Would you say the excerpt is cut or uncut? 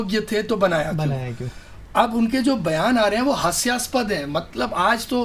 uncut